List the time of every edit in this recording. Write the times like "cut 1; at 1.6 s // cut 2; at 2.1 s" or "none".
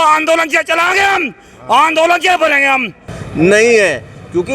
cut 1; at 3.0 s